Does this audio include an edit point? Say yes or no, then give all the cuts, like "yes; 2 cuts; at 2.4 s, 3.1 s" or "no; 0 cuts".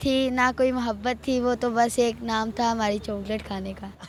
no; 0 cuts